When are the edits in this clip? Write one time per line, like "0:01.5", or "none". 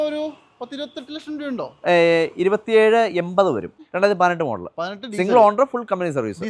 0:03.8